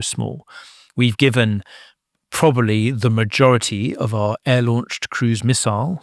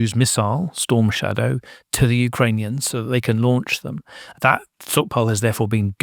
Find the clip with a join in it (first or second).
second